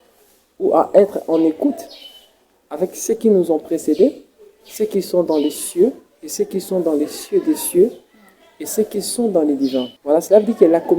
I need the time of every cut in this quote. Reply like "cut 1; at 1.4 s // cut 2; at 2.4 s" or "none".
cut 1; at 9.9 s